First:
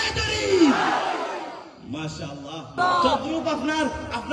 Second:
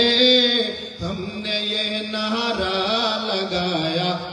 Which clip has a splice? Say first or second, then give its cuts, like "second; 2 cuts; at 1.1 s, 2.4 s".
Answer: first; 1 cut; at 2.7 s